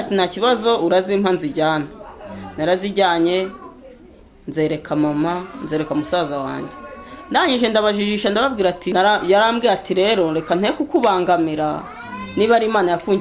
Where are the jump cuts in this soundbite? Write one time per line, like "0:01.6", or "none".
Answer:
0:08.8